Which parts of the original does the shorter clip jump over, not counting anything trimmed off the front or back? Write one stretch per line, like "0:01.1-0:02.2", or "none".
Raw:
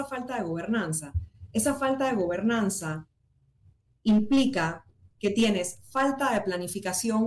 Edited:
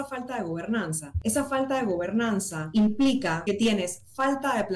0:01.0-0:01.3
0:02.9-0:03.9
0:04.7-0:05.2